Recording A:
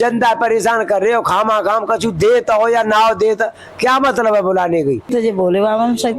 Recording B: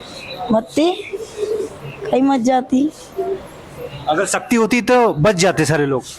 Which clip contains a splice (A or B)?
A